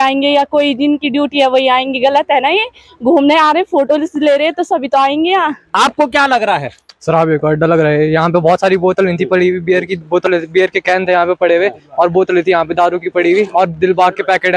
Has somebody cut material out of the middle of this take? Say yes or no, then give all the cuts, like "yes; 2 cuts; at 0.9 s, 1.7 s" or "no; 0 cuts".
yes; 1 cut; at 5.6 s